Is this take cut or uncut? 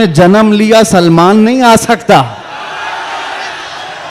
uncut